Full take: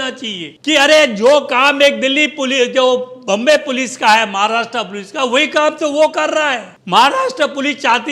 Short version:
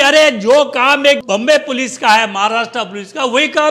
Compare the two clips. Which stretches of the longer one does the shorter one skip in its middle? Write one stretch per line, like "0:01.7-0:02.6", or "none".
0:02.0-0:03.2